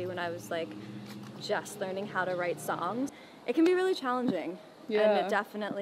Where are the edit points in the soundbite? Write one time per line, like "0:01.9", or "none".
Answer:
0:03.2